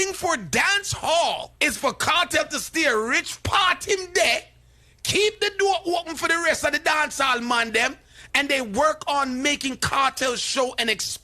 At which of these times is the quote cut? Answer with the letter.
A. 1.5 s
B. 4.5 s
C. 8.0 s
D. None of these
A